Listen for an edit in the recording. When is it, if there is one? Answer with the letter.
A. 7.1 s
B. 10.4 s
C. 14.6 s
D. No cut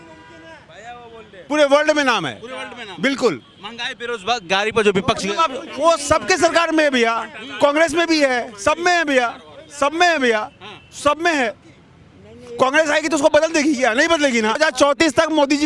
C